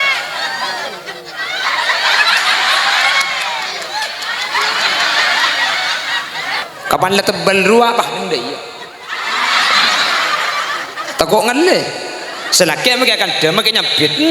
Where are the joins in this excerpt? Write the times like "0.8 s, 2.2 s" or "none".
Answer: 6.6 s